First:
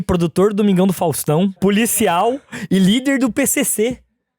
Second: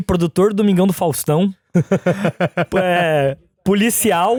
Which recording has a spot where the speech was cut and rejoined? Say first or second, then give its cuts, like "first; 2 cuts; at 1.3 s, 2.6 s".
first; 1 cut; at 1.5 s